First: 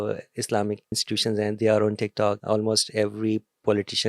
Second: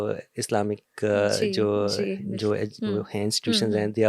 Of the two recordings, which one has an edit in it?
first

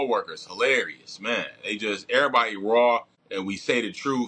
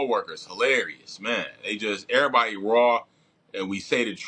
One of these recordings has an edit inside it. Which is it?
first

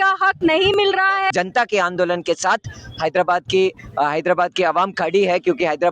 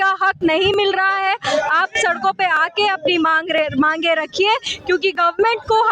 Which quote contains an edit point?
first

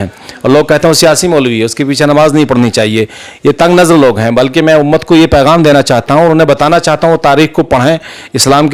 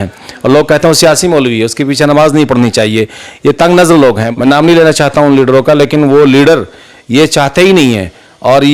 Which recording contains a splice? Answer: second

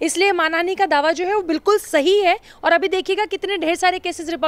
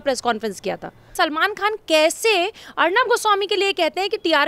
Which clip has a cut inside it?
second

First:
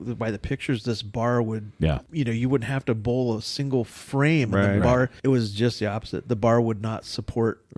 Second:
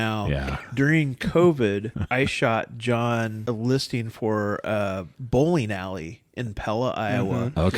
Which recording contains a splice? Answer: second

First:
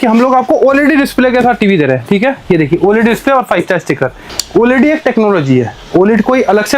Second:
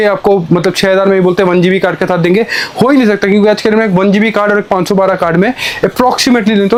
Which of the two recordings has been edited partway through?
first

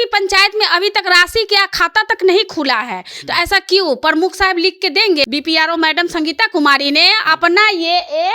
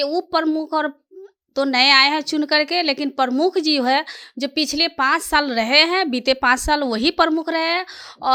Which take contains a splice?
first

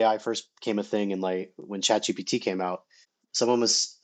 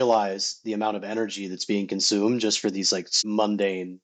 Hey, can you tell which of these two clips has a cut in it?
second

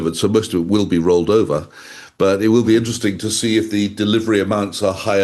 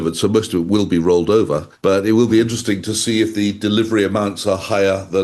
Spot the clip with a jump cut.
second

